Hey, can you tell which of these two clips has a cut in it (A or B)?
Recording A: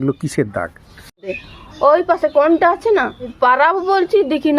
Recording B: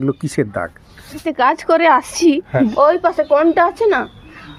A